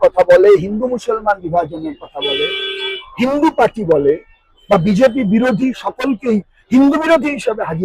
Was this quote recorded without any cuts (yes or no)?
yes